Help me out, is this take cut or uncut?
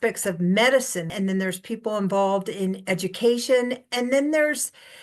cut